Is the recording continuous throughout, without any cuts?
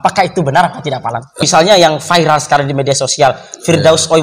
no; 1 cut; at 1.5 s

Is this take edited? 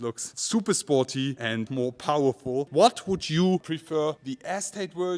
yes; 2 cuts; at 1.7 s, 2.7 s

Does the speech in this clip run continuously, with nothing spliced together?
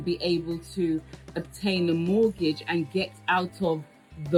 yes; 0 cuts

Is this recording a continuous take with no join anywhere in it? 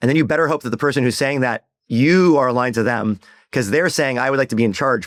yes; 0 cuts

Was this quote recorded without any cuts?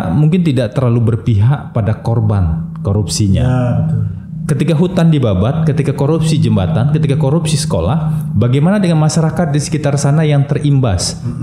yes; 0 cuts

